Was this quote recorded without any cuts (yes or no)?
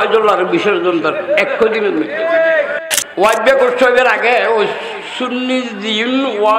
no